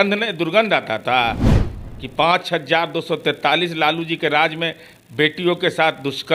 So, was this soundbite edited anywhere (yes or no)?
no